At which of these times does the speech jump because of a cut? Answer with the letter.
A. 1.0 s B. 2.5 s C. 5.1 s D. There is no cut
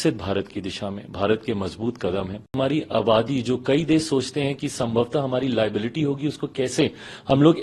B